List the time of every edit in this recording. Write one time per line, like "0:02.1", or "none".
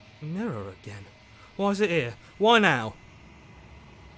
0:02.9

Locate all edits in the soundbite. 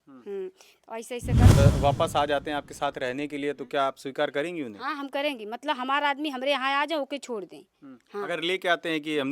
0:01.6

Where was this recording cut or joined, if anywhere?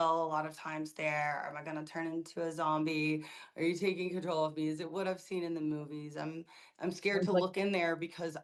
none

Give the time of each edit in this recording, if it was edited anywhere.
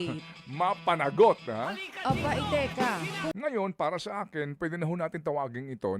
0:03.3

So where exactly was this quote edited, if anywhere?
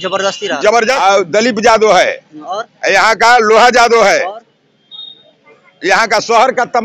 0:00.9

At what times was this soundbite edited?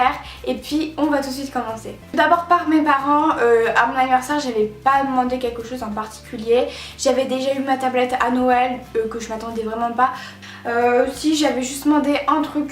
0:10.2

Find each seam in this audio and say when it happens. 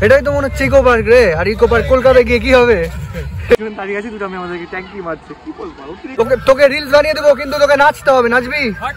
0:03.6
0:06.1

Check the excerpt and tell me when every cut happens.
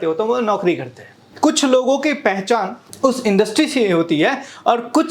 0:01.2
0:02.8

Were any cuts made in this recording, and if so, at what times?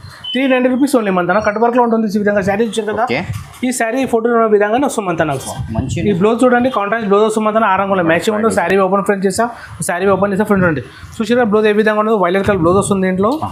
none

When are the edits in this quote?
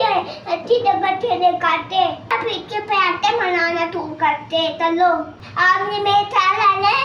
0:02.3
0:05.4

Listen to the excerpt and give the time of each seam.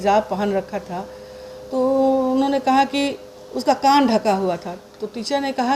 none

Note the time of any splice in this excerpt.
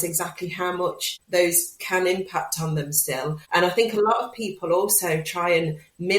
0:01.1
0:03.4

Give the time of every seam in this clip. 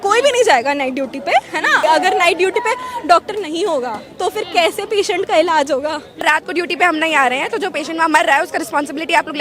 0:01.8
0:06.1

